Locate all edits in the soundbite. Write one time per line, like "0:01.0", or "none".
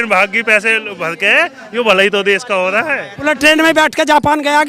0:03.3